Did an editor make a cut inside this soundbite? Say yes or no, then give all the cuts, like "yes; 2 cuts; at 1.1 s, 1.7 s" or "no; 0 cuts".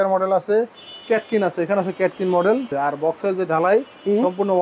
yes; 1 cut; at 2.7 s